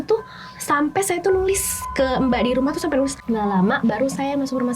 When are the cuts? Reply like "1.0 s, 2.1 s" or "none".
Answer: 3.2 s